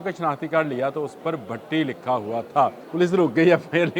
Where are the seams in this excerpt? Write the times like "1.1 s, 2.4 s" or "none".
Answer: 2.8 s